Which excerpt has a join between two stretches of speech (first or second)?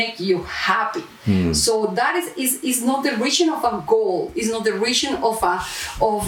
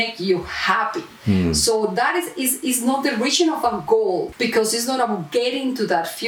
second